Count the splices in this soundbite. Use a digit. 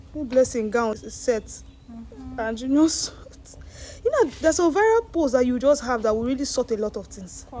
1